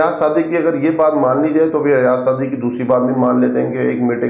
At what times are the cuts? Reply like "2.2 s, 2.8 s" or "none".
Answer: none